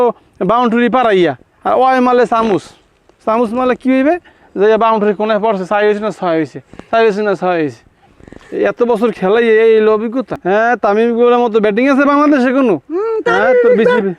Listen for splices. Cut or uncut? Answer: cut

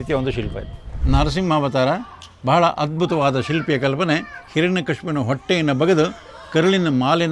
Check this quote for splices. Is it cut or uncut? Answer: cut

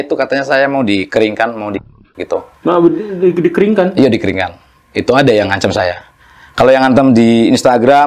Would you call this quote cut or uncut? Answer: uncut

